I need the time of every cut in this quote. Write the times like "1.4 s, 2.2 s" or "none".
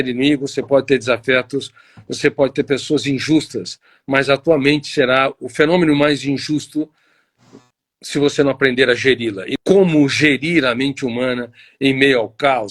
9.5 s